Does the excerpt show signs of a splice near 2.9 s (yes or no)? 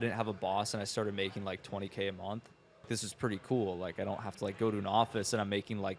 yes